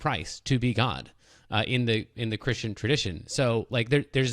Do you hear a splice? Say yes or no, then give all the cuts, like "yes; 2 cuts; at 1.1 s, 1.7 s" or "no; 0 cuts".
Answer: no; 0 cuts